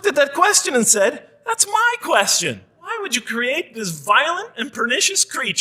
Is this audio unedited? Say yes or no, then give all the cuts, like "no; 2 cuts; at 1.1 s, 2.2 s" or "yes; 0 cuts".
no; 1 cut; at 3.0 s